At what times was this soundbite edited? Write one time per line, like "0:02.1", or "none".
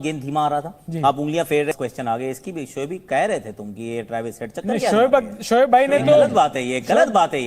0:01.7